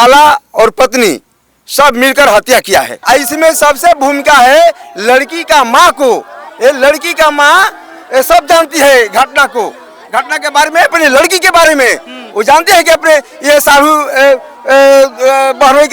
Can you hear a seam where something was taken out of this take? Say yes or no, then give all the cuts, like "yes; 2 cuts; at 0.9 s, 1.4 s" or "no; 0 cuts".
yes; 1 cut; at 2.9 s